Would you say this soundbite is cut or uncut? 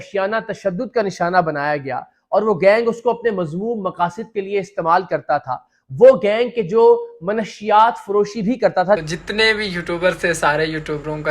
cut